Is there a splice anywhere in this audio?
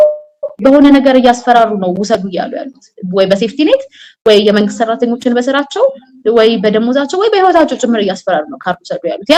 no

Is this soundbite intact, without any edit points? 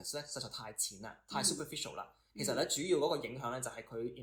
yes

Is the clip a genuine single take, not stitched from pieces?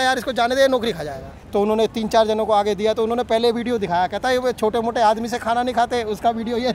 no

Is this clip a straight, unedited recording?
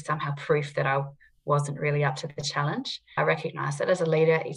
no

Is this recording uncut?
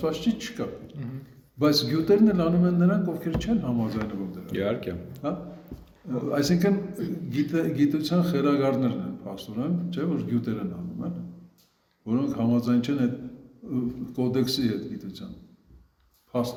yes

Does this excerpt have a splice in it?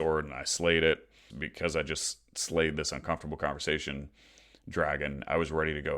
yes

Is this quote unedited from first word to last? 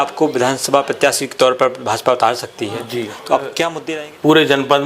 no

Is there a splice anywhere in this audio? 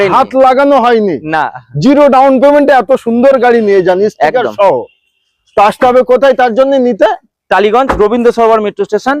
no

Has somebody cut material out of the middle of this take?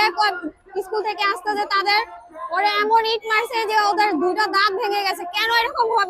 no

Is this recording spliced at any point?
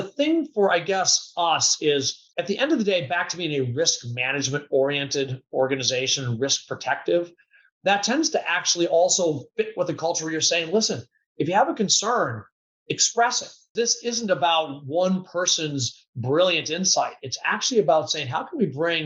yes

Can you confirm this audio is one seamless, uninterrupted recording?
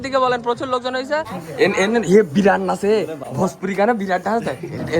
no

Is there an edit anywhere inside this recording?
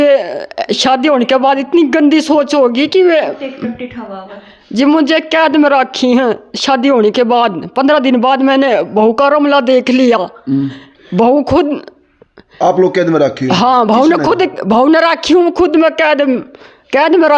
no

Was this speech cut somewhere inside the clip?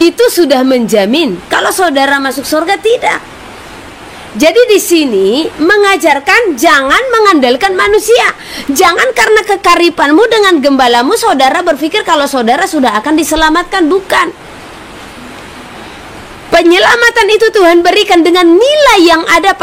no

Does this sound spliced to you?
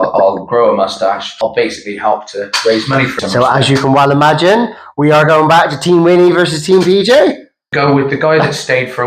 yes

